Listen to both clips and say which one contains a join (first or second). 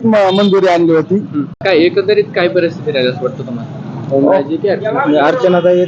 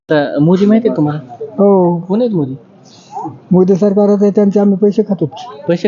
first